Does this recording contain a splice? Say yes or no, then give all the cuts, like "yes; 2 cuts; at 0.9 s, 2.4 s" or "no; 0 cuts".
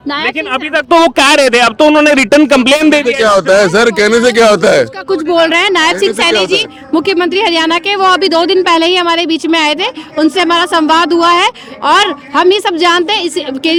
no; 0 cuts